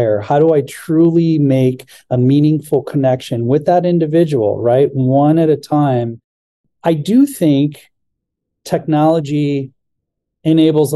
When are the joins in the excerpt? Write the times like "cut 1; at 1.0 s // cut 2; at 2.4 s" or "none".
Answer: cut 1; at 6.7 s